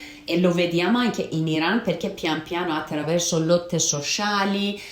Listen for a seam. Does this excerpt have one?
no; 0 cuts

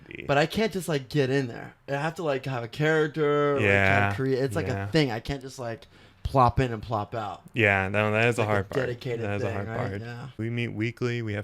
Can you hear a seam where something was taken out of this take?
yes; 1 cut; at 10.4 s

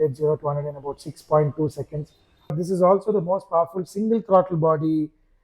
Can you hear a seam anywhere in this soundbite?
yes; 1 cut; at 2.6 s

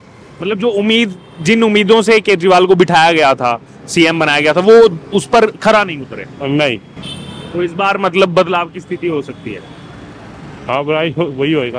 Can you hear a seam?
no; 0 cuts

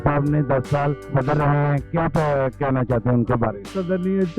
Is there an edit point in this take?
yes; 1 cut; at 1.1 s

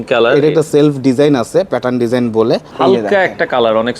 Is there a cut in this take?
yes; 1 cut; at 2.7 s

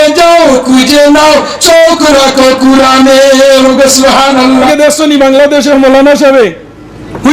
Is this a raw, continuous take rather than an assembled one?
no; 1 cut; at 4.7 s

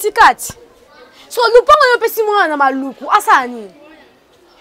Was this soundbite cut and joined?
no; 0 cuts

